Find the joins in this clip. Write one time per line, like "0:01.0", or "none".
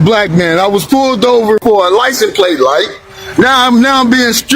0:01.6